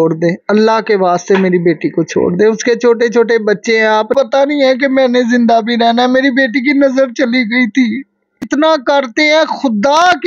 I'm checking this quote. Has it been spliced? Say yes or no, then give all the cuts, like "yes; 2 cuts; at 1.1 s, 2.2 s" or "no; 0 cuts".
yes; 2 cuts; at 4.1 s, 8.4 s